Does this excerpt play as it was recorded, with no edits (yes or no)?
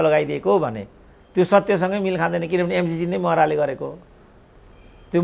yes